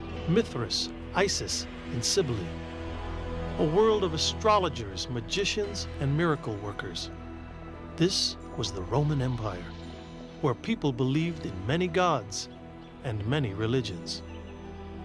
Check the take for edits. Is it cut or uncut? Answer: cut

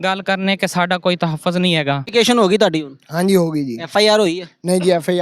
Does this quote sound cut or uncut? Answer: cut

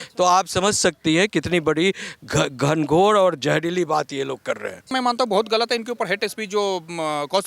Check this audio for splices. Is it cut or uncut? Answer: cut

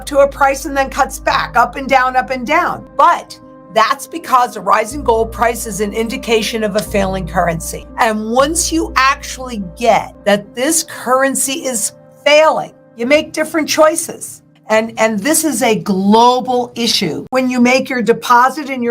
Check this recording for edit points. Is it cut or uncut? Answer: cut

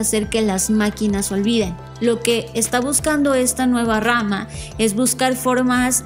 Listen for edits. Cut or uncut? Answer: cut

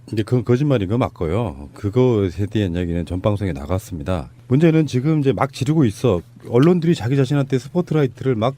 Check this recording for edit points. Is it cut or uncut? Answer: cut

